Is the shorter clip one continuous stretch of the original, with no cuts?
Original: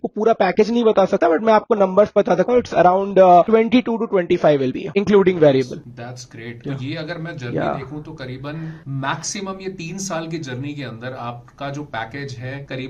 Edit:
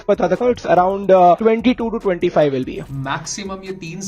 no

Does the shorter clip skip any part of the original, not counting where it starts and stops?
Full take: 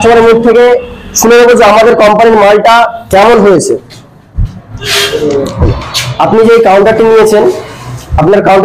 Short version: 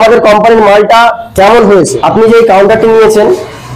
yes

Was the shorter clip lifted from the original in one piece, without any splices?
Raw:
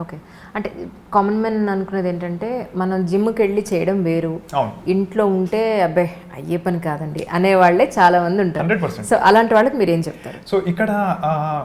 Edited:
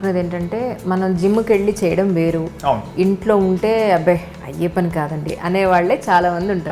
yes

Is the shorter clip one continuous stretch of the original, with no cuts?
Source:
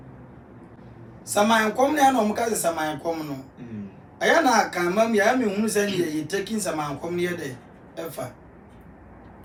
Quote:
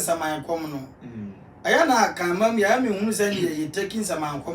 yes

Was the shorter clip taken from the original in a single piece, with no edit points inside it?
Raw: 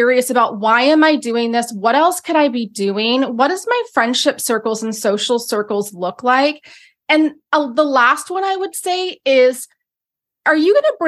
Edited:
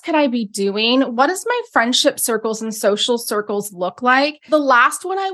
no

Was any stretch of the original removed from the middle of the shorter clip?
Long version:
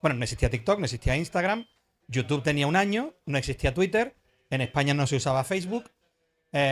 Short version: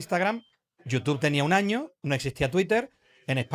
no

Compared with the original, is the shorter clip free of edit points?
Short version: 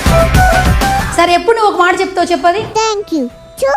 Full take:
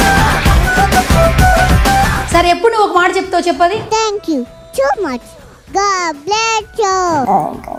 no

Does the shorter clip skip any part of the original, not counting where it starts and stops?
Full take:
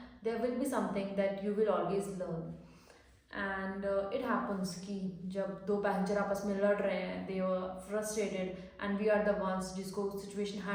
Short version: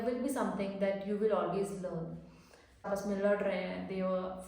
yes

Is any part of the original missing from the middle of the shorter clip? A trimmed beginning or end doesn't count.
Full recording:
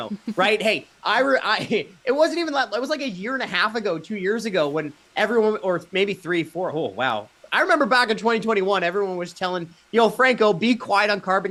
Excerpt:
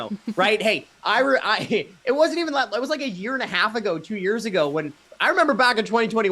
yes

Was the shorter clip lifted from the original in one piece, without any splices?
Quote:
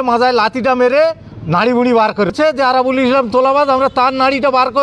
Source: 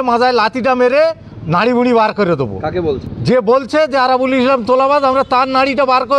no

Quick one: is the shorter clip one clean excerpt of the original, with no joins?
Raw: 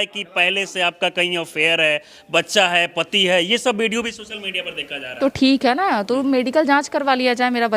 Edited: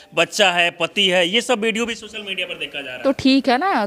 yes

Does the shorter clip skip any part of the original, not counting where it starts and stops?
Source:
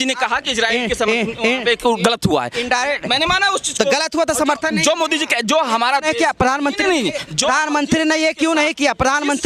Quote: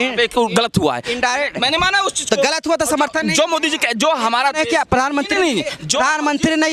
no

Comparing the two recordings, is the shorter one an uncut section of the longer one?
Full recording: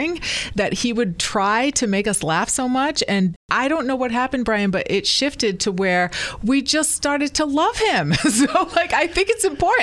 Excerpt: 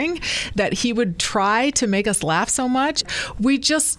no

